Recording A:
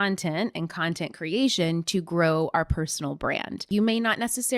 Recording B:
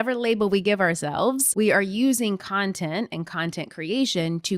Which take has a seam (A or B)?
A